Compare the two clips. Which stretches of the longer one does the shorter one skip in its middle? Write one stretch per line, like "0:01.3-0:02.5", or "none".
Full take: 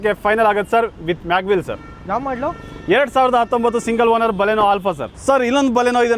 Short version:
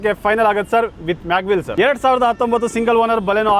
0:01.7-0:02.8